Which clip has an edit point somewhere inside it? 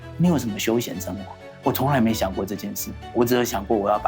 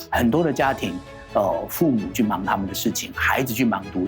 first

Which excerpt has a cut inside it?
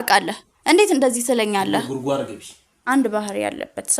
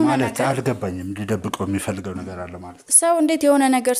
first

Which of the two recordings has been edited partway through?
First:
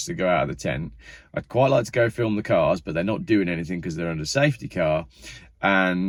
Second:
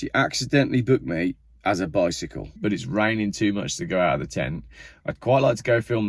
second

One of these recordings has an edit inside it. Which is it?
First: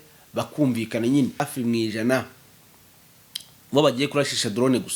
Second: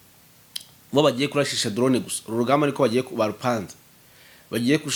first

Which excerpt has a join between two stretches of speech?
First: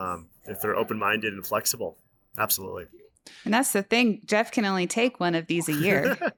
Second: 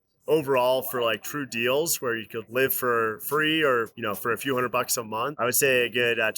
second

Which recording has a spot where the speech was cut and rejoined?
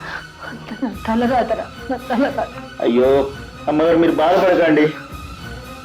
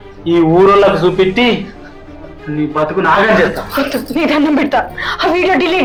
first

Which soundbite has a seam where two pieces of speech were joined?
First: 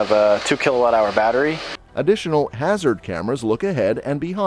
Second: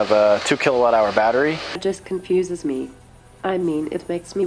second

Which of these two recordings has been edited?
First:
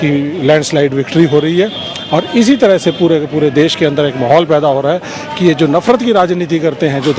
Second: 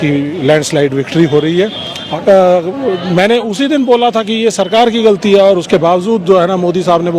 second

